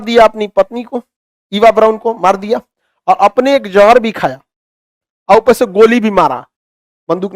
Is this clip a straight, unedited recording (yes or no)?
yes